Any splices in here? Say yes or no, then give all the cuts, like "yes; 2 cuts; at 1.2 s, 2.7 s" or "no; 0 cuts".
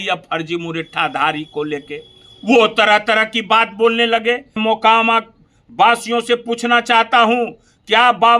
yes; 1 cut; at 4.6 s